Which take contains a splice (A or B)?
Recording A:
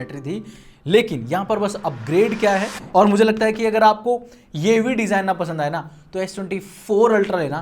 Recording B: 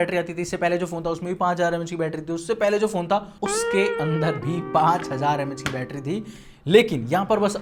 A